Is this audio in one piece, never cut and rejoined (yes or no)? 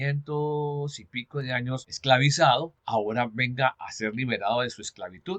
no